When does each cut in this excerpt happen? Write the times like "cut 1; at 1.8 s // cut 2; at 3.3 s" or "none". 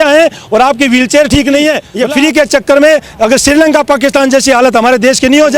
cut 1; at 1.9 s